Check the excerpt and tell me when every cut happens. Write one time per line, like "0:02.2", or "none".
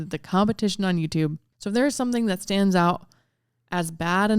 0:01.5